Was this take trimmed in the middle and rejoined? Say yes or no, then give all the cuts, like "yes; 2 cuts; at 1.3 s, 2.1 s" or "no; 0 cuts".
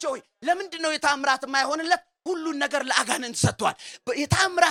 no; 0 cuts